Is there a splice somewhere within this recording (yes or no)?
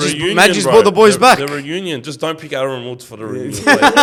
no